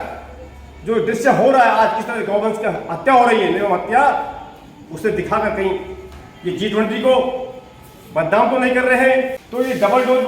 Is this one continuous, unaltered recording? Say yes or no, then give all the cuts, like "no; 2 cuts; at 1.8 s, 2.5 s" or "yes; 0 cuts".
no; 1 cut; at 9.4 s